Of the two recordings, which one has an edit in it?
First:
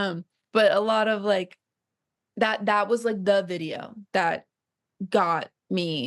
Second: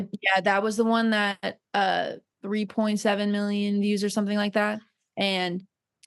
second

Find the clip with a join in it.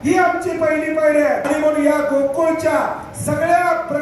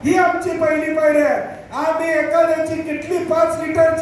first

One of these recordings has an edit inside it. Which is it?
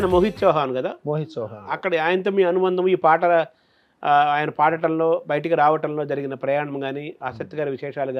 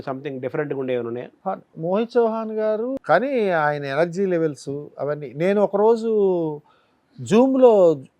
second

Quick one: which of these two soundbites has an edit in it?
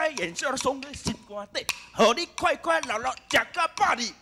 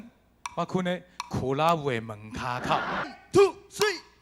second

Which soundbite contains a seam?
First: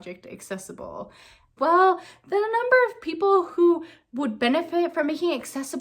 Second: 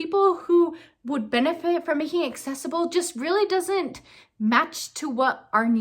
first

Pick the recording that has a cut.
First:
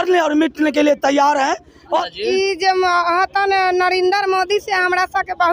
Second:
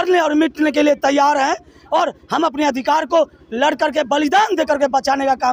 first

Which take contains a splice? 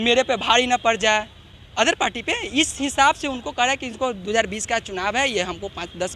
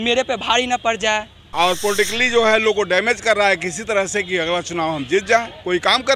second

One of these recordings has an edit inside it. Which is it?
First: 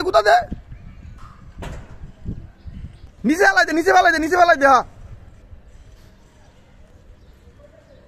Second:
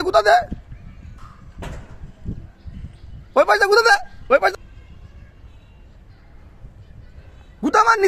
first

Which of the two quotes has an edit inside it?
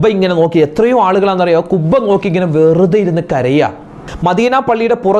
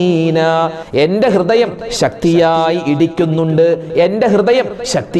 first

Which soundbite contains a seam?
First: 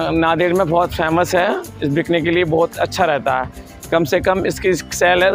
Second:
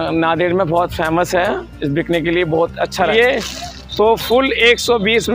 second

